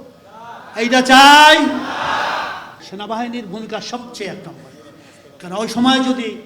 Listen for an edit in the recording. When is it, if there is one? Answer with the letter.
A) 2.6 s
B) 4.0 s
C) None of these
A